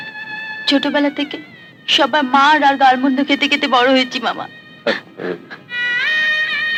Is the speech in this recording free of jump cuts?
yes; 0 cuts

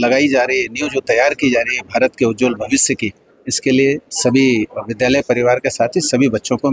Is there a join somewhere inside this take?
no; 0 cuts

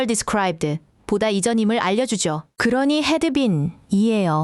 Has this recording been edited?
yes; 1 cut; at 2.5 s

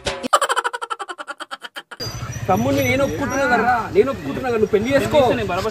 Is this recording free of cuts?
no; 1 cut; at 2.0 s

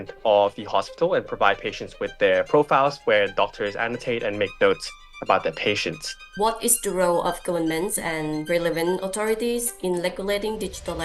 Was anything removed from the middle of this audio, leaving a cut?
yes; 1 cut; at 6.2 s

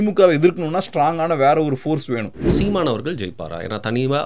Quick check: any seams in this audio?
yes; 1 cut; at 2.5 s

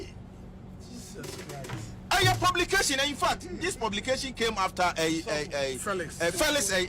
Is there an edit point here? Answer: no; 0 cuts

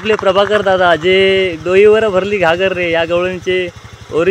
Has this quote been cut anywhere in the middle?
no; 0 cuts

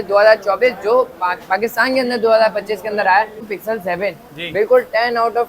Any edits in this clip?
yes; 1 cut; at 3.5 s

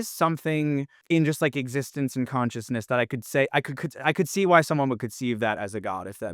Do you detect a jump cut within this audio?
yes; 1 cut; at 0.9 s

